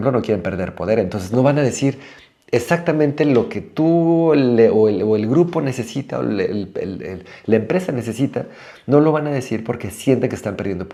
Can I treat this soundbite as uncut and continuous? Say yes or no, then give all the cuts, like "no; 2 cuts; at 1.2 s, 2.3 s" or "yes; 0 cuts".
yes; 0 cuts